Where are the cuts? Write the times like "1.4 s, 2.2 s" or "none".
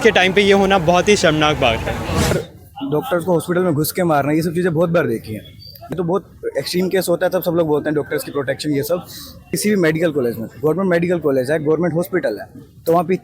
2.3 s, 5.9 s, 9.5 s